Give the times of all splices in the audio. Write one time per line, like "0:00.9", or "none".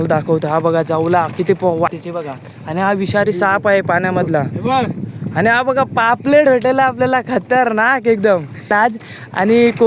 0:01.9
0:08.7